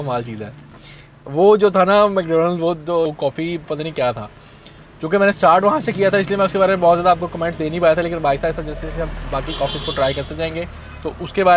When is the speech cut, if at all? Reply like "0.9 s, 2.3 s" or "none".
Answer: none